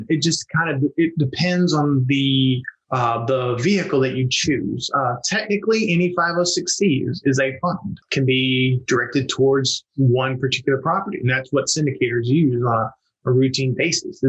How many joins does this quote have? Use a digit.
1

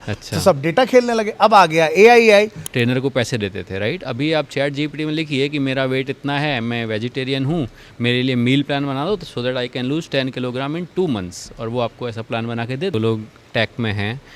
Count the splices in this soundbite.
2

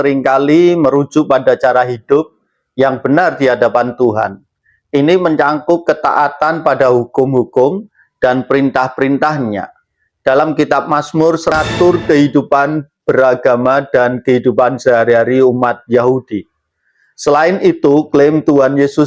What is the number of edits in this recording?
1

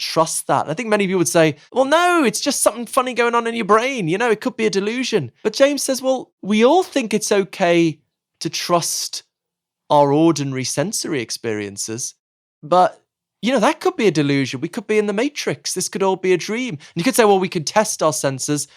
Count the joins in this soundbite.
3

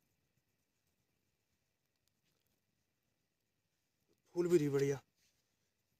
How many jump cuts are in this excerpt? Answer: 0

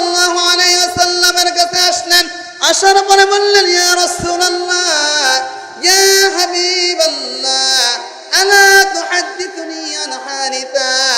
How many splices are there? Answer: 1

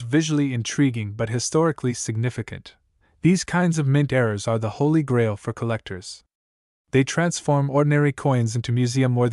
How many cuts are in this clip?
0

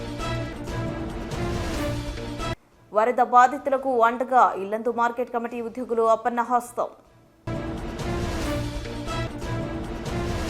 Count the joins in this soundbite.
1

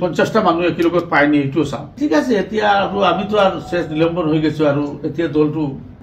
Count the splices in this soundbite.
1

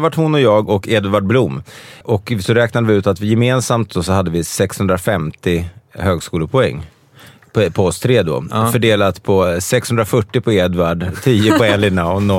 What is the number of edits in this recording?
1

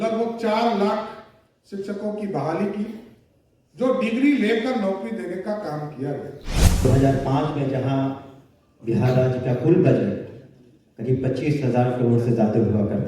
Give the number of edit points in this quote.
1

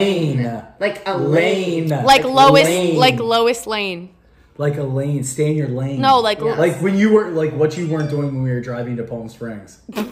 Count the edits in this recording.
0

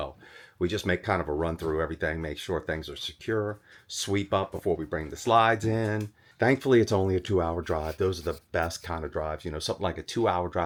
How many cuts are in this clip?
0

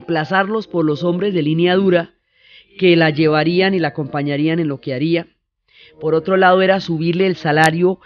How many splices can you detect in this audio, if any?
1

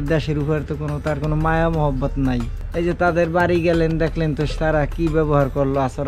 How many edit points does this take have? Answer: 0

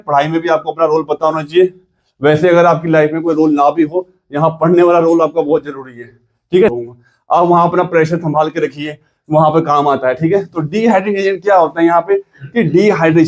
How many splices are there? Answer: 1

